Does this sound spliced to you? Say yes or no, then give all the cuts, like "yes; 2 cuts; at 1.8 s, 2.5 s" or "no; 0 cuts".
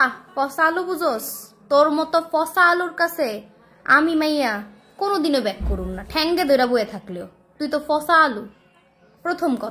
no; 0 cuts